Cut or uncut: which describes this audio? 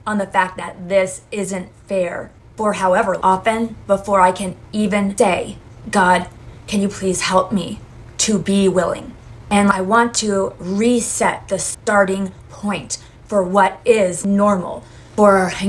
uncut